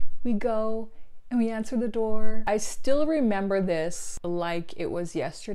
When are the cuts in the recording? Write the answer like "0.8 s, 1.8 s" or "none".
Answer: 2.4 s